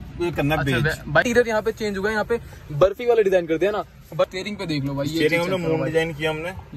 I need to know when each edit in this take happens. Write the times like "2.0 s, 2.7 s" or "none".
1.2 s, 4.3 s